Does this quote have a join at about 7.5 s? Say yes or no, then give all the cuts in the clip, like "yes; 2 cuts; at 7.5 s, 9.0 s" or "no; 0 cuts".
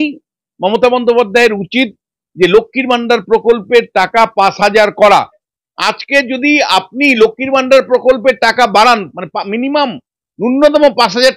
no; 1 cut; at 5.5 s